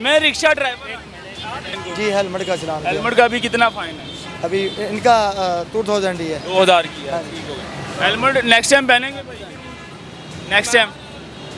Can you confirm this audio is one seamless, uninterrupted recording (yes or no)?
no